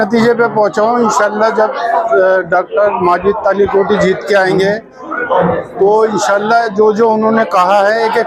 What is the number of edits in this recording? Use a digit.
0